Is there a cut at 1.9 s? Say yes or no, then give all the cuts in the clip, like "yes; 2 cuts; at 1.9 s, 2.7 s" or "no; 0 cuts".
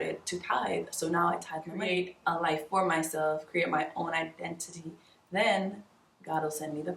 yes; 1 cut; at 1.9 s